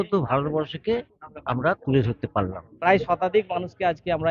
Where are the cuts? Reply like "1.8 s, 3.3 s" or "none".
2.9 s